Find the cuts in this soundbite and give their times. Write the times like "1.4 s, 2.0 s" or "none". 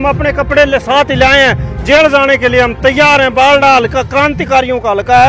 none